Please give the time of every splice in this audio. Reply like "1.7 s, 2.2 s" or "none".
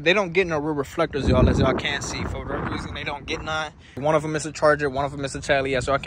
3.9 s